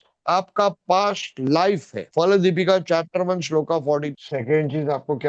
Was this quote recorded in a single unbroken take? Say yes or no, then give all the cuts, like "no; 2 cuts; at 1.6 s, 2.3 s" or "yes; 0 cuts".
no; 1 cut; at 4.1 s